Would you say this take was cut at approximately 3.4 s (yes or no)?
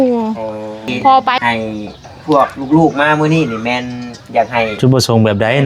no